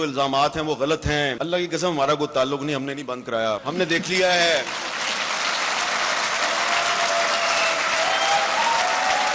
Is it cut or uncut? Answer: cut